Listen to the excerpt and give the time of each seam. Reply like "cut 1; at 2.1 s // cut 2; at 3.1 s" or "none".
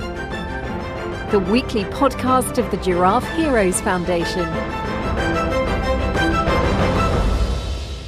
none